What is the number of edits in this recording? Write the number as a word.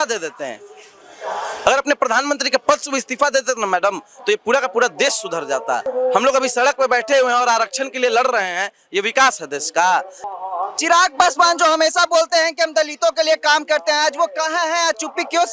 two